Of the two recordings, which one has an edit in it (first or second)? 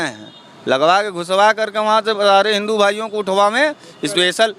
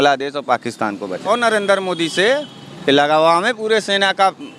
second